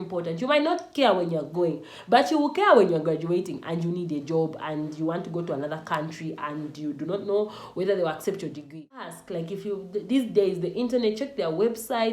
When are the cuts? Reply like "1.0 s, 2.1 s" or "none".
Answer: 9.1 s